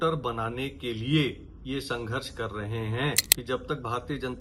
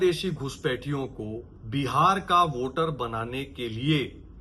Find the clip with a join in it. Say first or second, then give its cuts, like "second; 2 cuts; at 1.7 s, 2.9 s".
first; 1 cut; at 3.3 s